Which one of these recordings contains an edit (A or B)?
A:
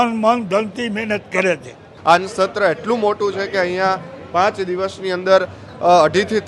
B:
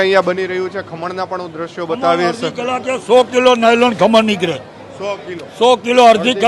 A